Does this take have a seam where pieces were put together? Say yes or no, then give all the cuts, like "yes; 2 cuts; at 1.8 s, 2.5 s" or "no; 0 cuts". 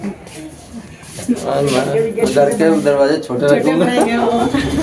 no; 0 cuts